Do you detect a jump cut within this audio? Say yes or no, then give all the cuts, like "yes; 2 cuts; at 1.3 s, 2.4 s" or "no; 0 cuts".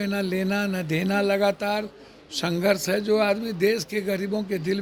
no; 0 cuts